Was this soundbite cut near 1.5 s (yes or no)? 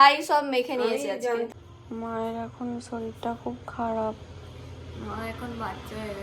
yes